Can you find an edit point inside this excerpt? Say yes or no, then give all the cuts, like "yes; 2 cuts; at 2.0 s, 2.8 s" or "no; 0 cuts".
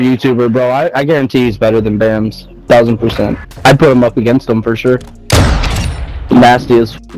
yes; 2 cuts; at 3.5 s, 5.1 s